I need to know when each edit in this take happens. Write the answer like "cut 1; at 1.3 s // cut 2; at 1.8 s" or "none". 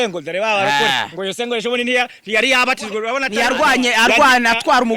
cut 1; at 3.7 s